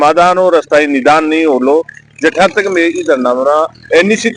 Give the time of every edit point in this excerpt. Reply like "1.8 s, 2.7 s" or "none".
none